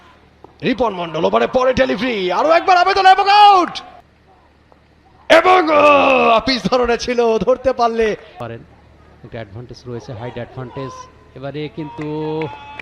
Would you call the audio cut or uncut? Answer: uncut